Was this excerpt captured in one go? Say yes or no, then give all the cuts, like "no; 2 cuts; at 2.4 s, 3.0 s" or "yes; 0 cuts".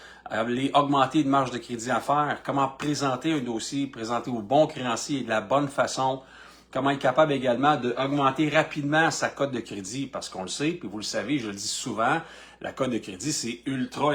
yes; 0 cuts